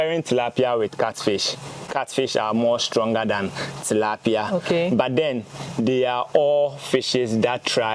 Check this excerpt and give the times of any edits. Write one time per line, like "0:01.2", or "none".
0:01.8